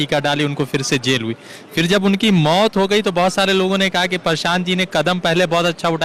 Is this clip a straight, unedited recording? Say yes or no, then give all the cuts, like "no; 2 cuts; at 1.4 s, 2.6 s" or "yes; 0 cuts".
yes; 0 cuts